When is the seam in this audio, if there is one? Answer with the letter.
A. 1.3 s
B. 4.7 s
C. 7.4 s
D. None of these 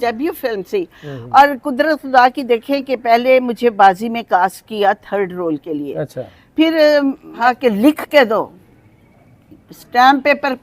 C